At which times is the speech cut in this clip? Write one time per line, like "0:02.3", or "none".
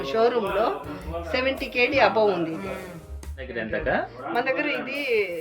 0:03.5